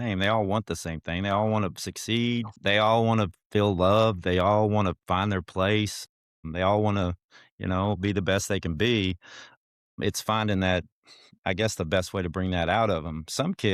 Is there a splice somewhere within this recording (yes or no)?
yes